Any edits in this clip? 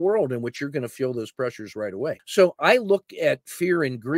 yes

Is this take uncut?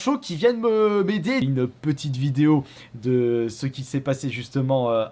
no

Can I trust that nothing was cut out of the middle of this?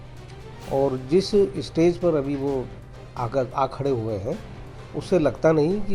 yes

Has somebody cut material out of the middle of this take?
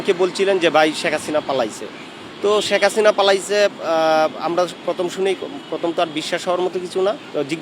no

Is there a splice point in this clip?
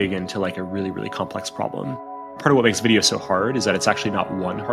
yes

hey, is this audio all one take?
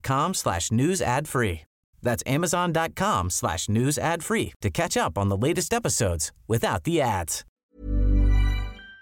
no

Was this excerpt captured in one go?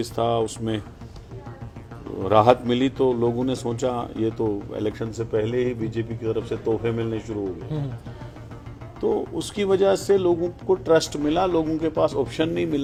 yes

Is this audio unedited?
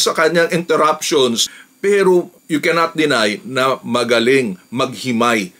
no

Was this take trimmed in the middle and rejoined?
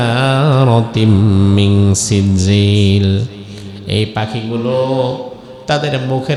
no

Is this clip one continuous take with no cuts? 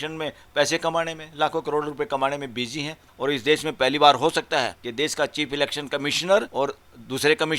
no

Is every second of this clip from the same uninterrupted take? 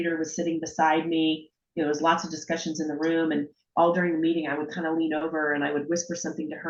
yes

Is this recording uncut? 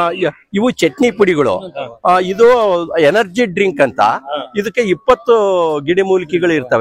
yes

